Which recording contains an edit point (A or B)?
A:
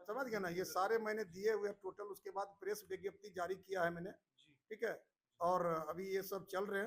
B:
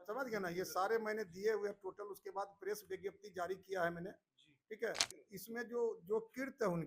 B